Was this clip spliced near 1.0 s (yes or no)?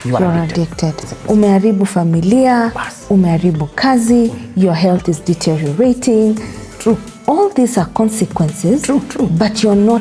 yes